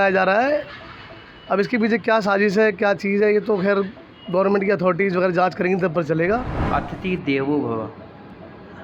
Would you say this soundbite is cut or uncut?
cut